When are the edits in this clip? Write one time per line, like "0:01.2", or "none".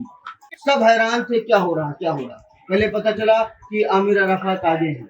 none